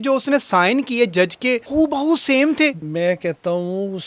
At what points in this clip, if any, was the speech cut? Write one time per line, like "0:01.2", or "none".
0:01.6
0:02.8